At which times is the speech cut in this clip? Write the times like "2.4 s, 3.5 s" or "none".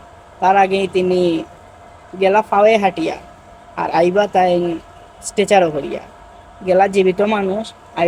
none